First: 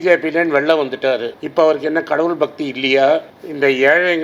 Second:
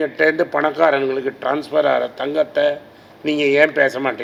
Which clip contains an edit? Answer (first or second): first